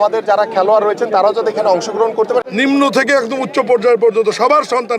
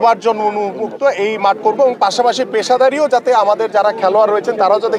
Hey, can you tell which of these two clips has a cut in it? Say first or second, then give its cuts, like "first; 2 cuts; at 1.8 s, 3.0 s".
first; 1 cut; at 2.5 s